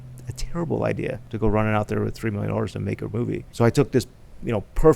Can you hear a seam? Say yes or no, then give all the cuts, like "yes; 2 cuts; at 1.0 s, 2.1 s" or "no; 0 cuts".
yes; 2 cuts; at 1.2 s, 3.5 s